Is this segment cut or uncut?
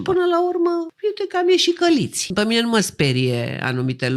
cut